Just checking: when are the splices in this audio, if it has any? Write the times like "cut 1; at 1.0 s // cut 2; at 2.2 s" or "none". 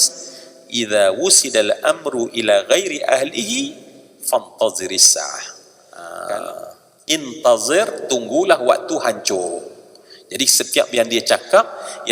cut 1; at 6.1 s